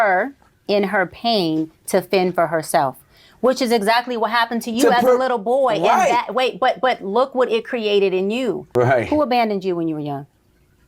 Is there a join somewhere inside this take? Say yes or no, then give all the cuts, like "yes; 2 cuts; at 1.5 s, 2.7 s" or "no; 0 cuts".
yes; 1 cut; at 8.7 s